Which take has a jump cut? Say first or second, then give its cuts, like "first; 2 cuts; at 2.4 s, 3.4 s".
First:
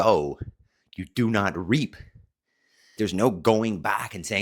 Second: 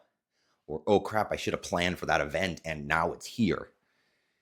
first; 1 cut; at 3.0 s